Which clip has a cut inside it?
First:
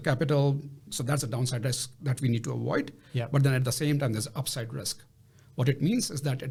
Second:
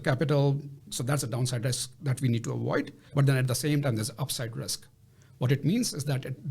second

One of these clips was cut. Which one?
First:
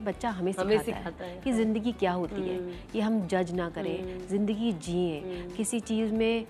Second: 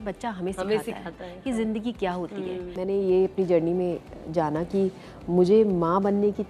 second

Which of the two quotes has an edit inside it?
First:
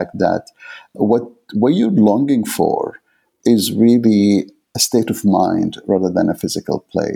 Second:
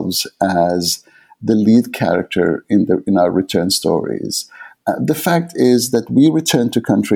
first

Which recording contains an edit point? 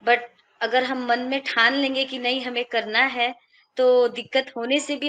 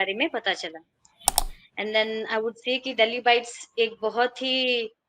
second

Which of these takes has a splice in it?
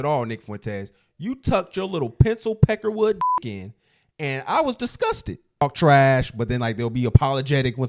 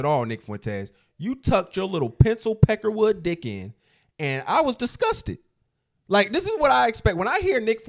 first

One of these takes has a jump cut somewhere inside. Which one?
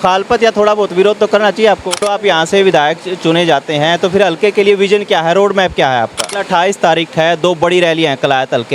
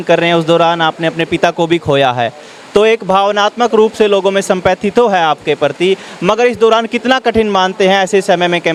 first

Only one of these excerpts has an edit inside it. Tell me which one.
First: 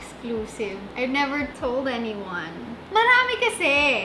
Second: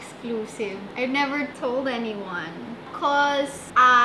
second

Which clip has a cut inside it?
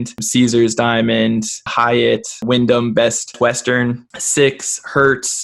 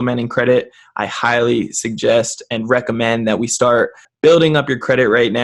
first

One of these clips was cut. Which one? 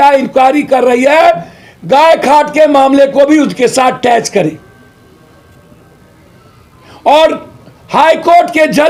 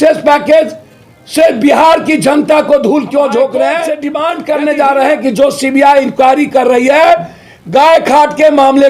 second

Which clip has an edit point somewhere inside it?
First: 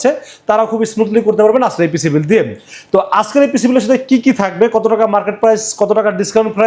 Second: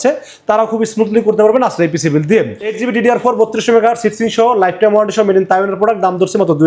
second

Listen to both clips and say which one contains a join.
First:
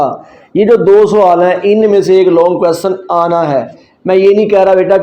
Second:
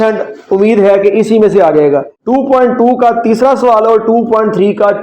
second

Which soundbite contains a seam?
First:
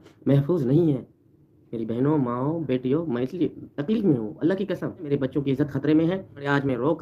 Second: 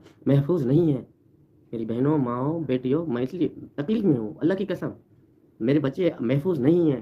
first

